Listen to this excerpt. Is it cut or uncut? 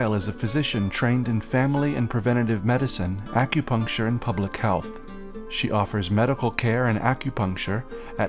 uncut